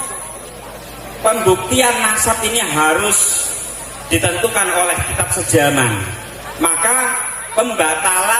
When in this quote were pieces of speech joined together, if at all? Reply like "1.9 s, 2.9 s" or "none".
6.4 s

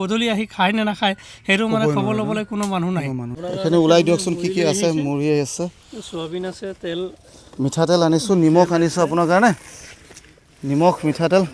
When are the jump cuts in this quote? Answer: 3.3 s

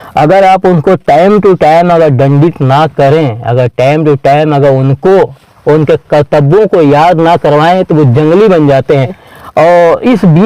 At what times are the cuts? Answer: 9.2 s

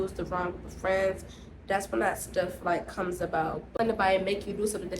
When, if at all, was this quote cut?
3.7 s

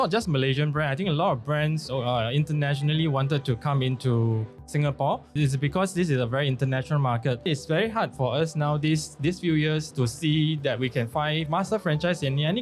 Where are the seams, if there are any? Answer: 5.3 s, 7.4 s, 9.2 s, 11.5 s

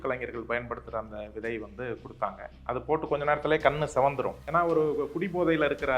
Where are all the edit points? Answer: 4.4 s

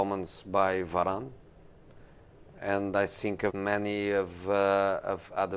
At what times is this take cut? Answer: none

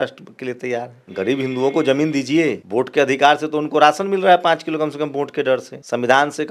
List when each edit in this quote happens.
none

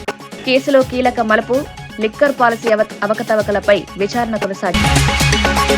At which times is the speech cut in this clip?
4.7 s

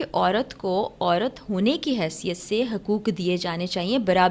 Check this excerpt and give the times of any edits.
none

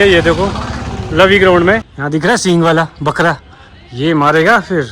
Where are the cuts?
1.9 s

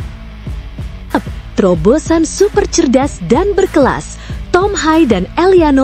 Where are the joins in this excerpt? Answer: 1.1 s

